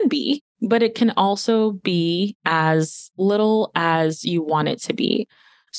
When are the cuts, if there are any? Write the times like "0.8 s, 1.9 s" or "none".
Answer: none